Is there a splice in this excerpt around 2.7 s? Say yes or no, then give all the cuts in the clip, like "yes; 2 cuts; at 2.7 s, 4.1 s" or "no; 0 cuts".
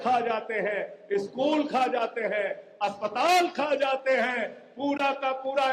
no; 0 cuts